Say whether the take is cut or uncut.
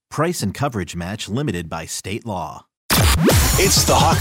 cut